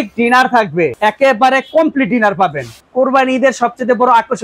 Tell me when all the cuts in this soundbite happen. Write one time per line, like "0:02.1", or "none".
0:00.9
0:02.8